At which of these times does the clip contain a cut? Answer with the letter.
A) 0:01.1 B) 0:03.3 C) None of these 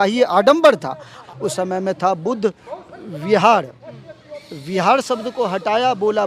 A